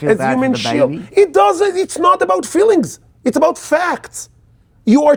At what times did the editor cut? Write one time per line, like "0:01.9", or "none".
none